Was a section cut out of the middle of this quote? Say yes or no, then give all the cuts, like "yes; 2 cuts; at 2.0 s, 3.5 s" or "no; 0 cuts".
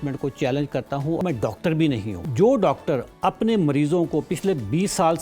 yes; 2 cuts; at 1.2 s, 2.2 s